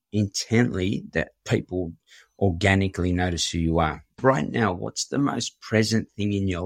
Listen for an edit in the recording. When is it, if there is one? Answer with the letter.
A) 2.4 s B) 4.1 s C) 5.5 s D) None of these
B